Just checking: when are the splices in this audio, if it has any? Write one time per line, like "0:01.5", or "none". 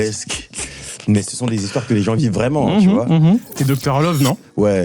0:03.5